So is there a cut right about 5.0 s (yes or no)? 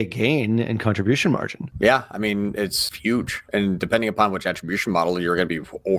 no